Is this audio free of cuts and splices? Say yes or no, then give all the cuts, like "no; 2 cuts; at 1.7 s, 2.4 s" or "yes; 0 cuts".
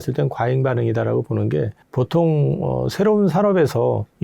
yes; 0 cuts